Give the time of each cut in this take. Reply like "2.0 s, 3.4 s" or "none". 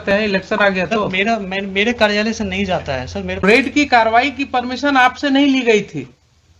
3.4 s